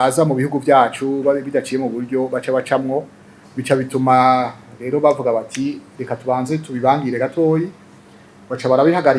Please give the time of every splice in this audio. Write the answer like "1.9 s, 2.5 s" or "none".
none